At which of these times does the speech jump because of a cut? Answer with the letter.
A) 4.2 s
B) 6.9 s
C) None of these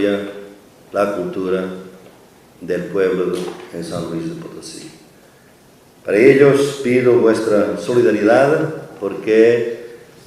A